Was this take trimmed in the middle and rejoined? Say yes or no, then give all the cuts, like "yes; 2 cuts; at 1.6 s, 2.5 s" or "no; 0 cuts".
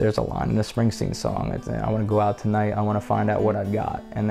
no; 0 cuts